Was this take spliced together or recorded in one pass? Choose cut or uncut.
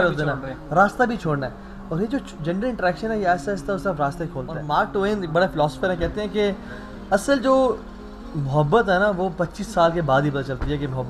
cut